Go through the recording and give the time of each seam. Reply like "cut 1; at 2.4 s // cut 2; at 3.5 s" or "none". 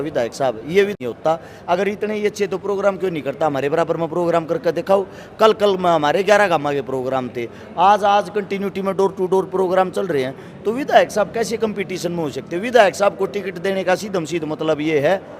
cut 1; at 0.9 s

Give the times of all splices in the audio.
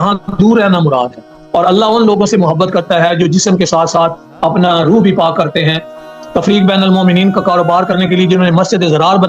cut 1; at 1.4 s // cut 2; at 6.2 s

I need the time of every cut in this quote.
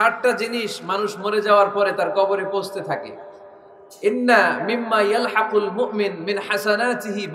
none

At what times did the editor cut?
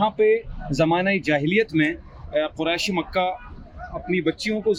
none

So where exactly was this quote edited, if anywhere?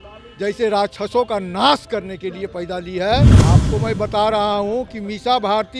cut 1; at 3.4 s

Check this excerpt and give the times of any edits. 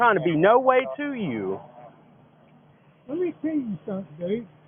none

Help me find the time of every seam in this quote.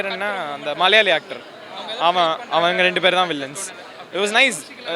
none

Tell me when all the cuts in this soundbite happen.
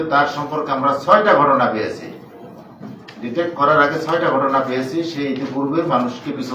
none

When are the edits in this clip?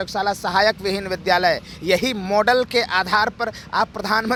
none

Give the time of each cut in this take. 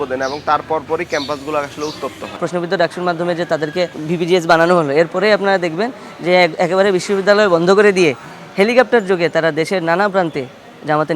cut 1; at 2.4 s // cut 2; at 4.0 s

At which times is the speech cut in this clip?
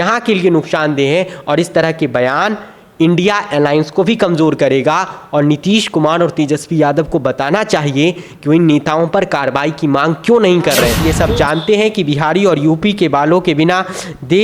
cut 1; at 11.0 s

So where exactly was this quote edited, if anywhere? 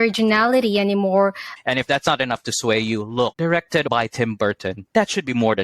cut 1; at 1.5 s // cut 2; at 3.9 s

